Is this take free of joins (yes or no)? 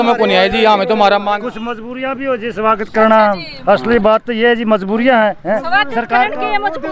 yes